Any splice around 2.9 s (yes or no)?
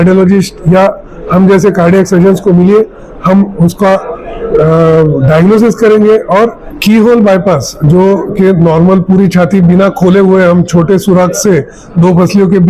no